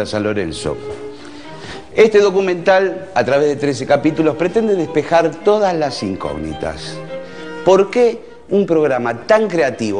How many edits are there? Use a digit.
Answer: 1